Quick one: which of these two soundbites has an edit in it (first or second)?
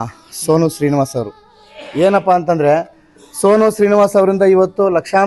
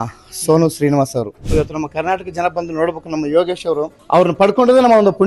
second